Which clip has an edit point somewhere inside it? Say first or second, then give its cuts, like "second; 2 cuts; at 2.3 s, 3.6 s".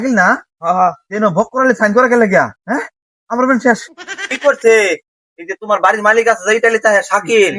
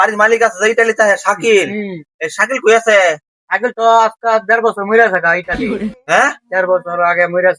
first; 2 cuts; at 2.6 s, 4.3 s